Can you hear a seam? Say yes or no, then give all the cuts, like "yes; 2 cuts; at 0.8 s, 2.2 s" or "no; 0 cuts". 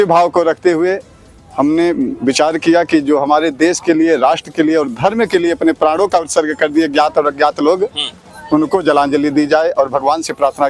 no; 0 cuts